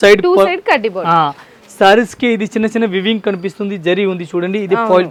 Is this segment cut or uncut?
uncut